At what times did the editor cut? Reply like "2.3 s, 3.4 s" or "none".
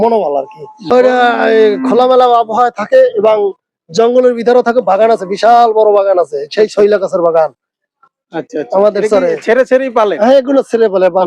0.9 s